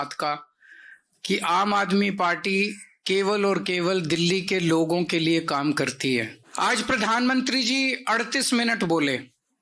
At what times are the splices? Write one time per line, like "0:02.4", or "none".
0:06.4